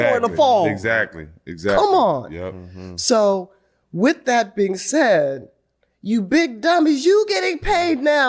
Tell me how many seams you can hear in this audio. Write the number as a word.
one